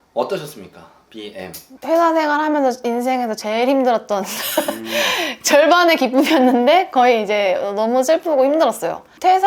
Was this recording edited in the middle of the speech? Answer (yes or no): no